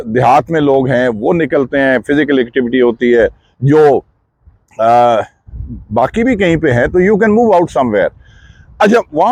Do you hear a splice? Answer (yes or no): no